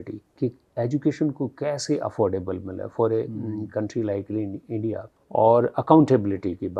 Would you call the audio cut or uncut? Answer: cut